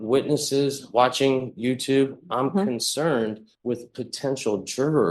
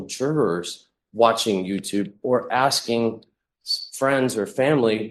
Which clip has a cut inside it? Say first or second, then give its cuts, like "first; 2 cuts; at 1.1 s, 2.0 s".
first; 1 cut; at 3.5 s